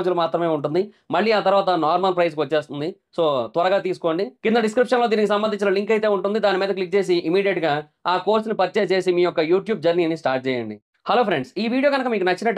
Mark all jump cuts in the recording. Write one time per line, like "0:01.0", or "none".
0:11.0

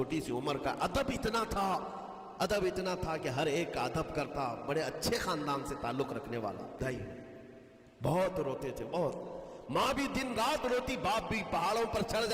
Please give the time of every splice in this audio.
0:06.8

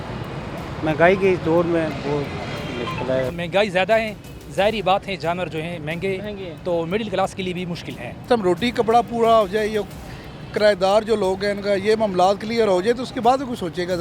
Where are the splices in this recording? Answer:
0:03.3
0:08.2

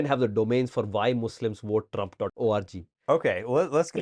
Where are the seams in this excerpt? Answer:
0:02.3

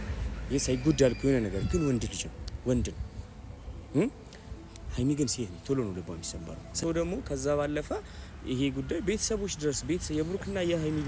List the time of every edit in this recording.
0:06.8

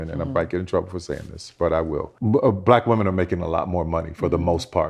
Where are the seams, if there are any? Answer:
0:02.1

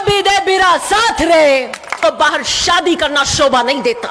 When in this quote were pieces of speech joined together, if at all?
0:02.0

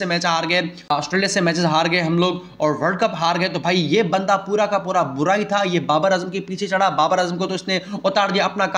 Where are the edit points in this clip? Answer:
0:00.9

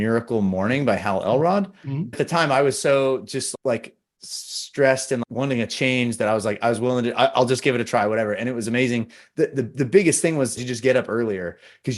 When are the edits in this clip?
0:02.2
0:05.2

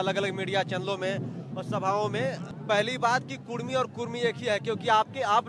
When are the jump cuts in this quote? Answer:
0:02.5

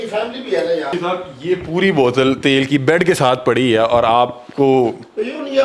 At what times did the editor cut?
0:00.9

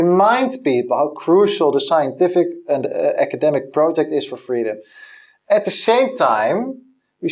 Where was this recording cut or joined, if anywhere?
none

